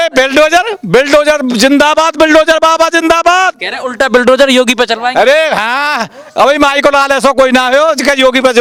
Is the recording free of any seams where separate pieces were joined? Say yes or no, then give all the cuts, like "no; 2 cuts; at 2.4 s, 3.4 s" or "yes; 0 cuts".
yes; 0 cuts